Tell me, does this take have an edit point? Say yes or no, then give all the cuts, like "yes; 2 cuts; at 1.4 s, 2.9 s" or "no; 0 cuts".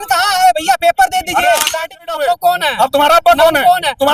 yes; 1 cut; at 2.1 s